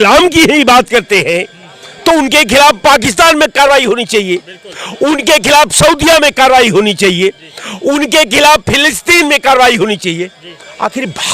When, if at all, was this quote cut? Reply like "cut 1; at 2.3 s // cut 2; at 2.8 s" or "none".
none